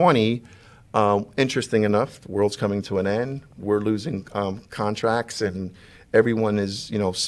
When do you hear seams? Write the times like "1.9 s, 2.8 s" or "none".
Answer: none